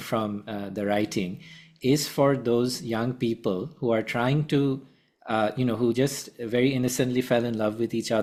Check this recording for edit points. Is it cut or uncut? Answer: uncut